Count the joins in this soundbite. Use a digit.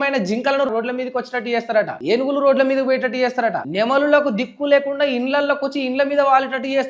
0